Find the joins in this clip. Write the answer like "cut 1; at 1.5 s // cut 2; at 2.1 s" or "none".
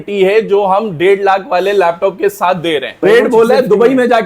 cut 1; at 3.0 s